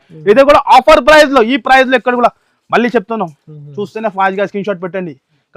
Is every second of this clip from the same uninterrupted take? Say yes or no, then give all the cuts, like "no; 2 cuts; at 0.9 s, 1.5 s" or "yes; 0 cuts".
yes; 0 cuts